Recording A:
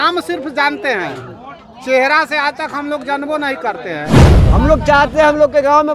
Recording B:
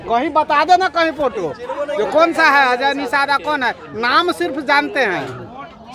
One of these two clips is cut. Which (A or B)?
A